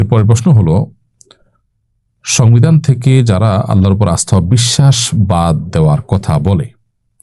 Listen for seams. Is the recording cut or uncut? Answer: uncut